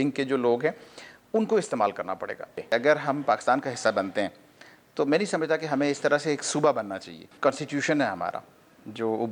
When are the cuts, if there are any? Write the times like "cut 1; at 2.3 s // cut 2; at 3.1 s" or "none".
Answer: cut 1; at 2.6 s // cut 2; at 7.3 s